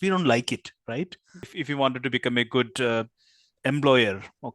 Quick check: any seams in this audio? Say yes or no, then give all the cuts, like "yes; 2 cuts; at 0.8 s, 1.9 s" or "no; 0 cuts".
yes; 1 cut; at 1.6 s